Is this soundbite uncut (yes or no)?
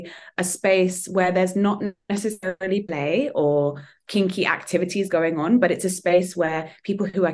yes